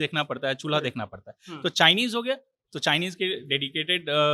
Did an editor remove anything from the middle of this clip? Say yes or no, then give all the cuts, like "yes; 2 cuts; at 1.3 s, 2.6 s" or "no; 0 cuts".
no; 0 cuts